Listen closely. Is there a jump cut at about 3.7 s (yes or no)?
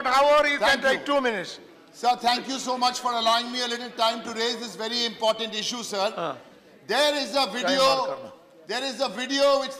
yes